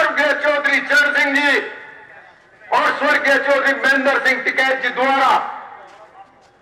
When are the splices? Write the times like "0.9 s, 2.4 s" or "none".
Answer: none